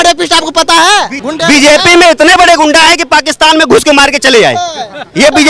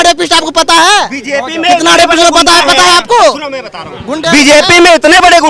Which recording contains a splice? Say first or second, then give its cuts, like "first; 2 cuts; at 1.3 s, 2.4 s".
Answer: first; 1 cut; at 1.2 s